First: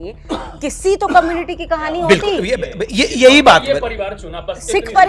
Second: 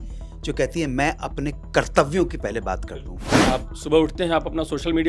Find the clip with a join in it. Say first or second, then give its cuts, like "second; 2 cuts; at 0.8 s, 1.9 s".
second; 1 cut; at 3.4 s